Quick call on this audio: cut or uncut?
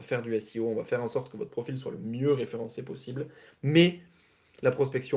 uncut